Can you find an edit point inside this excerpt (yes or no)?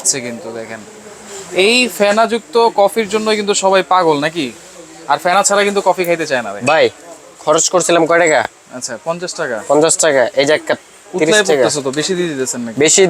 no